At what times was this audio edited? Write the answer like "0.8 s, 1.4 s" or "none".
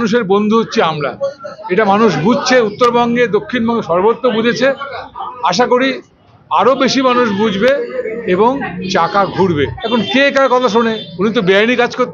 9.8 s